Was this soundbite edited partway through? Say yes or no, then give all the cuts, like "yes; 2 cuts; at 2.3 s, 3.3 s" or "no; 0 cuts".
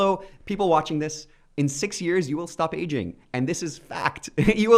no; 0 cuts